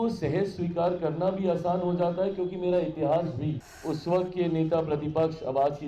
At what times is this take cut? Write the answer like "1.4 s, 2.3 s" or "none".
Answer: 3.7 s